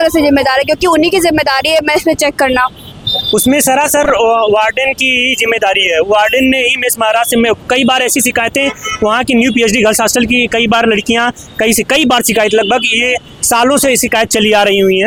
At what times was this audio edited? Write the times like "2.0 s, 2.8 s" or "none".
none